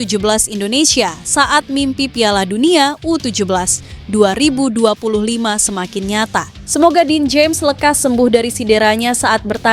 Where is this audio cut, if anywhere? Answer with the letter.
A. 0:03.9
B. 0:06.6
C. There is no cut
B